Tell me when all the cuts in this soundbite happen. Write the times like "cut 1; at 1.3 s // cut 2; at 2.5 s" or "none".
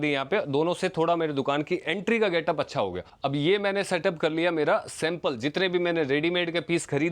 cut 1; at 3.1 s